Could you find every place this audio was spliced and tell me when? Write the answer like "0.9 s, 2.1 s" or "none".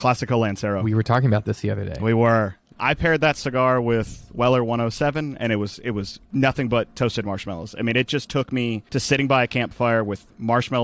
2.6 s, 6.2 s, 8.8 s